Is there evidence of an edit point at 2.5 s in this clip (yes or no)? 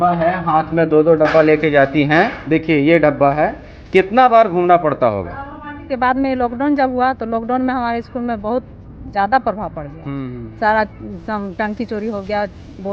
no